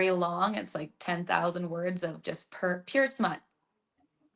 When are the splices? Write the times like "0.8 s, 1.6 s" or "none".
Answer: none